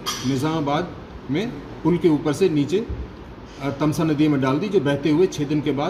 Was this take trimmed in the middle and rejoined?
no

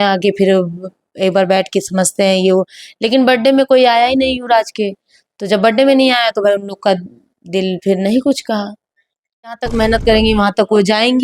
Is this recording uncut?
no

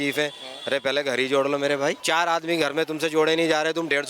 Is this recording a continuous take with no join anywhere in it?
no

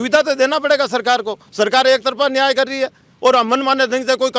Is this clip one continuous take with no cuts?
yes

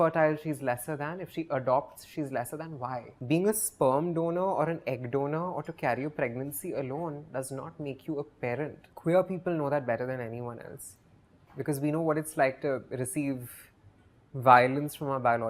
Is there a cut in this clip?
no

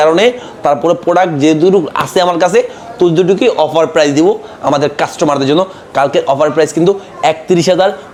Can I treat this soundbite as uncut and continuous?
yes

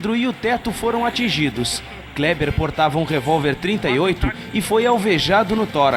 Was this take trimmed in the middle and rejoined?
no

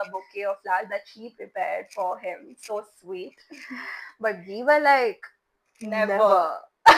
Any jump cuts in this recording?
no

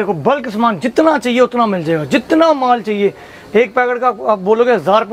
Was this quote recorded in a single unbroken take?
yes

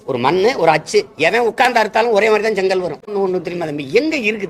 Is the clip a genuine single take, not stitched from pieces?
no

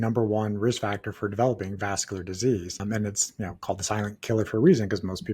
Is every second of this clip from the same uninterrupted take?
no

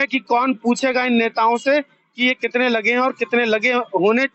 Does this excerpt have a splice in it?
no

